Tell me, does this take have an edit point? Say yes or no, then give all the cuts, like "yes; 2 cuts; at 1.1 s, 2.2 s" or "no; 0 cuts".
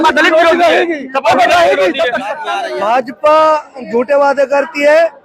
yes; 1 cut; at 2.5 s